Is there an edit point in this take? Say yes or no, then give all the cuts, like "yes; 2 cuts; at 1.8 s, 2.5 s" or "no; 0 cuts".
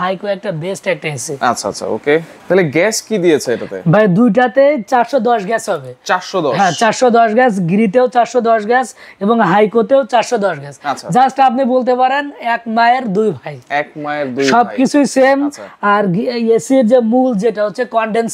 no; 0 cuts